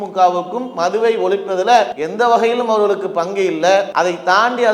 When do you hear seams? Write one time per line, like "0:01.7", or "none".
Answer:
0:02.0
0:03.9